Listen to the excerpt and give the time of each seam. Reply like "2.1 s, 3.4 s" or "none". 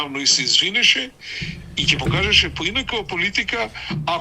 none